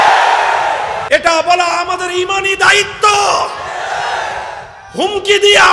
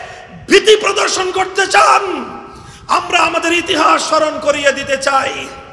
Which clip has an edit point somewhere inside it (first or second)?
first